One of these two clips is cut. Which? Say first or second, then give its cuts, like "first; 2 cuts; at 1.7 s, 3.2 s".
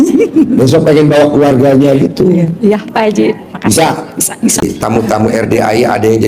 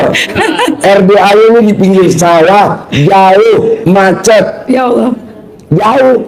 first; 1 cut; at 4.6 s